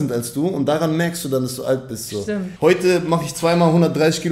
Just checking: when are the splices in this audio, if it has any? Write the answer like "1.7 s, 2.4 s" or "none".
2.5 s